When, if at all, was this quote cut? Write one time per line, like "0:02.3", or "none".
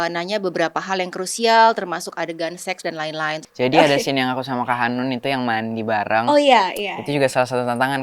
0:03.4